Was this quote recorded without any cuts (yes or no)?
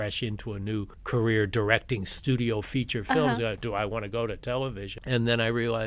no